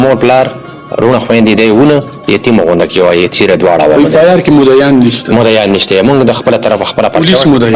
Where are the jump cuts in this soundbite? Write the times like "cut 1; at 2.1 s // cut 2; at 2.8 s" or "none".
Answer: none